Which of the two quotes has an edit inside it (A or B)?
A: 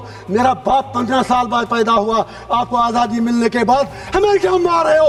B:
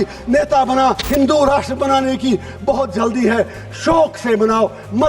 B